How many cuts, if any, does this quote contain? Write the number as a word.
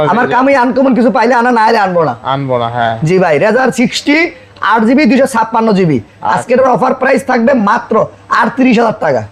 zero